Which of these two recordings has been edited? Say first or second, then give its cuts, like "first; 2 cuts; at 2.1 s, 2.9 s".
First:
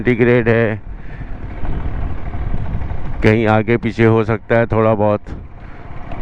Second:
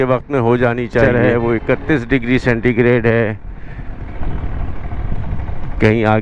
second; 1 cut; at 1.0 s